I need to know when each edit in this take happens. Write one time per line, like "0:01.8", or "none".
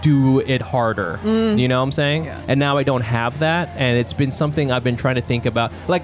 none